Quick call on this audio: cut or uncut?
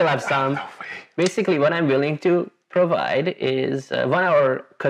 cut